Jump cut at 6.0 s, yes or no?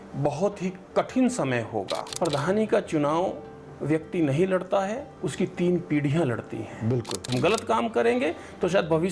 no